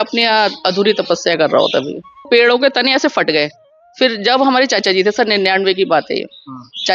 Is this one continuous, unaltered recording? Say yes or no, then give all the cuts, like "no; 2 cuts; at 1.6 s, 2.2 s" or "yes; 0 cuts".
no; 1 cut; at 2.3 s